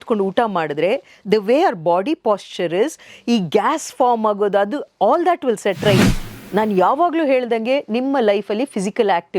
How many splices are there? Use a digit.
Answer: 1